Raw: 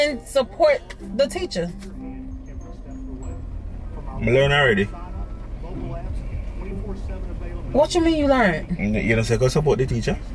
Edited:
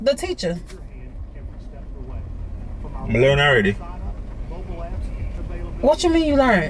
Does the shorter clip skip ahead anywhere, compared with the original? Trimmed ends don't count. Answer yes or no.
yes